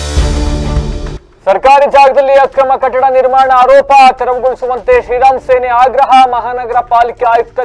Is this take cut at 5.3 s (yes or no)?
no